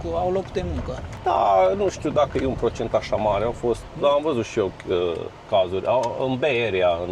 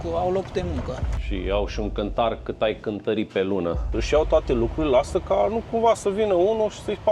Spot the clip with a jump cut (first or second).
second